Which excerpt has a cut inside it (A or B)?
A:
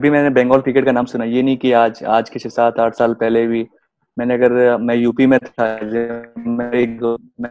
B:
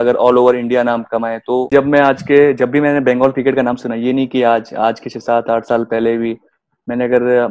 B